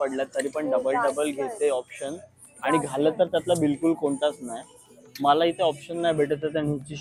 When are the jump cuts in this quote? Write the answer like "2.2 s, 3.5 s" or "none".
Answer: none